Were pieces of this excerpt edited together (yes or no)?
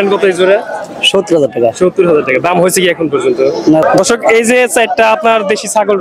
yes